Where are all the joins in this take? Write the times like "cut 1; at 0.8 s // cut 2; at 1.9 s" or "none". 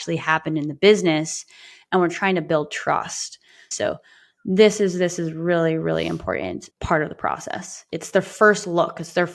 cut 1; at 3.6 s